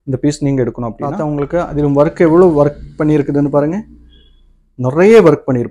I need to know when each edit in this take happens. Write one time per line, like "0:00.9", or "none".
0:01.1